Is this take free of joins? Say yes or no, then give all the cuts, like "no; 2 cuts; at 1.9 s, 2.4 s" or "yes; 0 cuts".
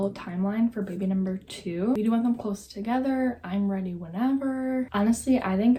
yes; 0 cuts